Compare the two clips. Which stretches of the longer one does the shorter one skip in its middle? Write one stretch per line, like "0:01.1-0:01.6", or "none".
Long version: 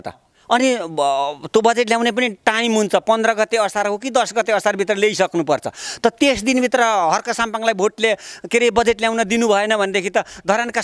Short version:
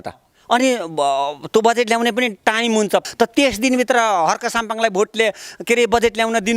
0:03.0-0:05.9